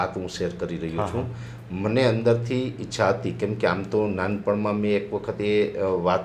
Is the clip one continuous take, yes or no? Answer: yes